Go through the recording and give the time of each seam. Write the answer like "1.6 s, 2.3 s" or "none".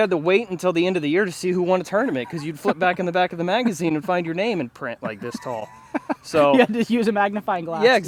none